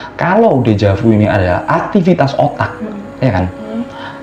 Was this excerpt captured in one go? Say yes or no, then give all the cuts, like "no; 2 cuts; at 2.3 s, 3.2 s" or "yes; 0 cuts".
yes; 0 cuts